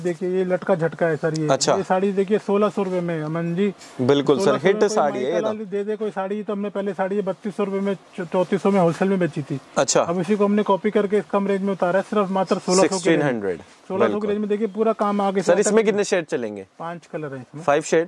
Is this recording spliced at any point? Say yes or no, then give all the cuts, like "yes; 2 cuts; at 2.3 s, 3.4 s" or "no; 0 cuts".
no; 0 cuts